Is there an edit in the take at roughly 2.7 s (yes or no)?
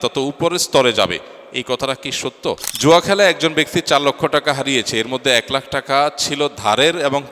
yes